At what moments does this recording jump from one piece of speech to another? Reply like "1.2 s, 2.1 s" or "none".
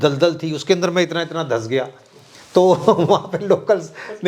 none